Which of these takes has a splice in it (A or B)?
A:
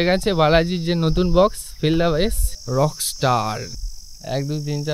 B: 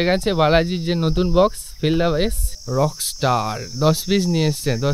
A